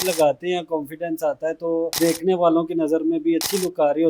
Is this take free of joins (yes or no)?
no